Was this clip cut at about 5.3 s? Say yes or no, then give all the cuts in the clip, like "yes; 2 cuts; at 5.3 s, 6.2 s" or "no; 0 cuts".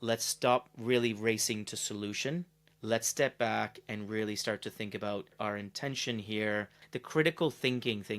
yes; 3 cuts; at 2.6 s, 5.3 s, 6.8 s